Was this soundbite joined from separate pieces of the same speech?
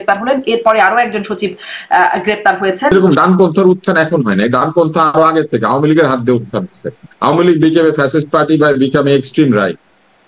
yes; 1 cut; at 2.9 s

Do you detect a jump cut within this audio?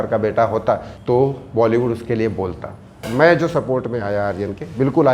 yes; 2 cuts; at 0.9 s, 3.0 s

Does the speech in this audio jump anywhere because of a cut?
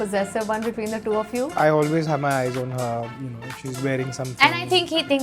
yes; 1 cut; at 1.5 s

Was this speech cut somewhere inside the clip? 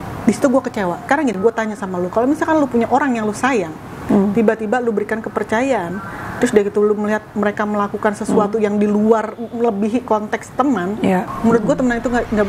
yes; 2 cuts; at 1.0 s, 11.3 s

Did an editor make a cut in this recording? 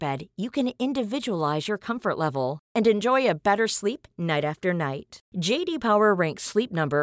no; 0 cuts

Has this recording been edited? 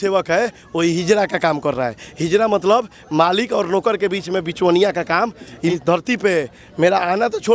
yes; 1 cut; at 5.7 s

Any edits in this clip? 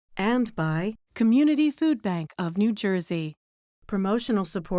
yes; 1 cut; at 1.0 s

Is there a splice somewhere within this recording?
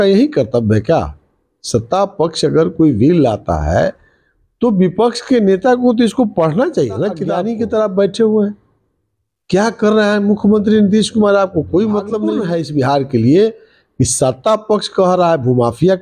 yes; 2 cuts; at 7.3 s, 12.3 s

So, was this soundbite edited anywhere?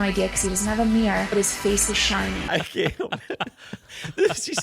yes; 1 cut; at 2.4 s

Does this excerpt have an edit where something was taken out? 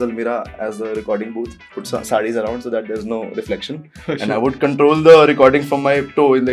no; 0 cuts

